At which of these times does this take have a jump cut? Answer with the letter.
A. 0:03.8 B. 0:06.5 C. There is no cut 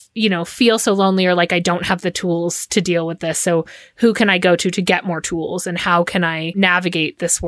B